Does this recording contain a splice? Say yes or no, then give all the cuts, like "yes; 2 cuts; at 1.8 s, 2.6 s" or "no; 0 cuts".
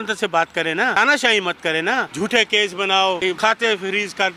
yes; 3 cuts; at 1.0 s, 2.1 s, 3.3 s